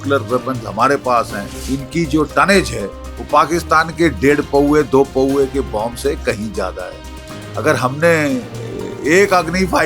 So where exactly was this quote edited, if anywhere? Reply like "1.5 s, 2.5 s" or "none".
1.6 s